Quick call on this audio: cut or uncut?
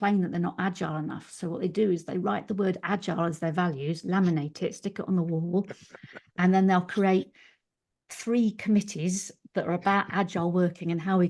uncut